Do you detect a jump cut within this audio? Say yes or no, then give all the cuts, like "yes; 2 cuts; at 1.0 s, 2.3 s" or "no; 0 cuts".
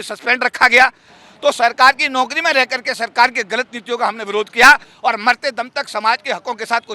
yes; 2 cuts; at 1.2 s, 4.9 s